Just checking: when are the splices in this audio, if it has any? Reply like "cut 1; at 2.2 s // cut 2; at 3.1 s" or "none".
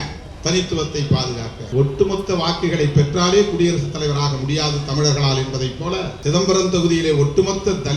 cut 1; at 1.6 s // cut 2; at 6.1 s